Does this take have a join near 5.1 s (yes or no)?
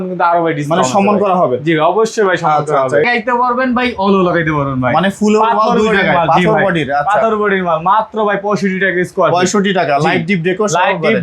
no